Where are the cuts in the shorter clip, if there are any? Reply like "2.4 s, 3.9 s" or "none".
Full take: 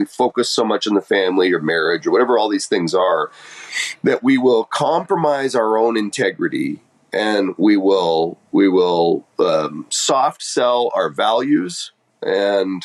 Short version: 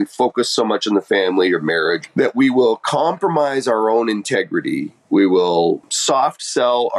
2.0 s, 5.0 s, 5.9 s